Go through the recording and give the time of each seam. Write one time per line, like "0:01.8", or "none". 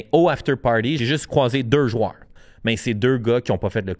0:01.0
0:02.5